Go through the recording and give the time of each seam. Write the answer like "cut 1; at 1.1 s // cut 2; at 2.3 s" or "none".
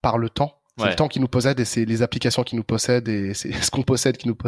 none